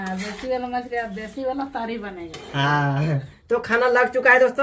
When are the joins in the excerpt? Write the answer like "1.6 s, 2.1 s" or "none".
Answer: 3.3 s